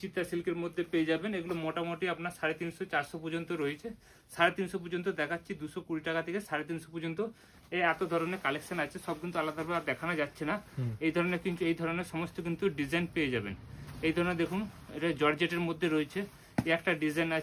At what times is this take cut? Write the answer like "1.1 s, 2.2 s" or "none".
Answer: none

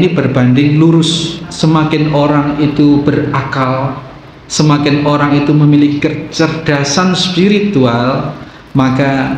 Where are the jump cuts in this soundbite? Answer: 1.5 s

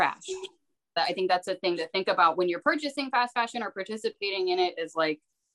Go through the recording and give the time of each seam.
1.0 s

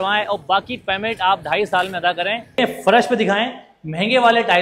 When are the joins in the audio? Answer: 2.6 s

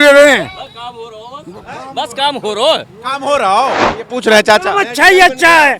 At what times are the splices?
3.9 s

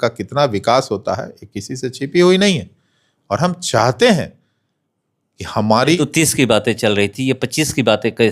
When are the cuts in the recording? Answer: 6.0 s

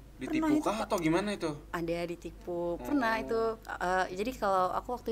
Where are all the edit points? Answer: none

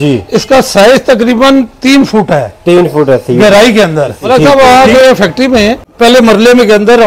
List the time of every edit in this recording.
4.2 s, 5.9 s

